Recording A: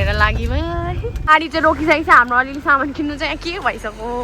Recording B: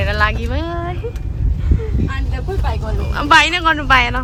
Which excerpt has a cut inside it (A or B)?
A